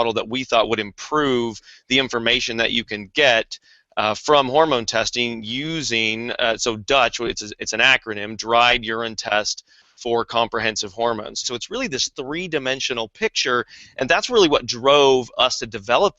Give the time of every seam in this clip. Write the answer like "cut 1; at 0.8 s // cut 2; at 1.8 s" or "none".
cut 1; at 11.4 s